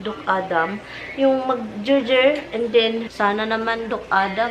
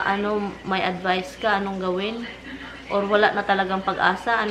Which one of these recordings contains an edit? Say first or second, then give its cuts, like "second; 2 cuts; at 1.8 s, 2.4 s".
first; 1 cut; at 3.1 s